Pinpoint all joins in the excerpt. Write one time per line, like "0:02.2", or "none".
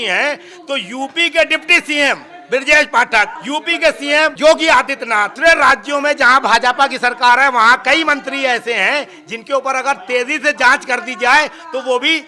0:03.4
0:04.4
0:05.3